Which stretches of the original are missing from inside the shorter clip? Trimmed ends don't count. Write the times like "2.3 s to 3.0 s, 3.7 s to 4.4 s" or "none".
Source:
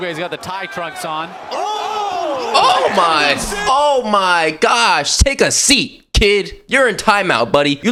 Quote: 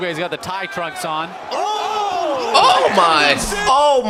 none